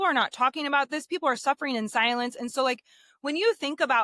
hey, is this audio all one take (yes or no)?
yes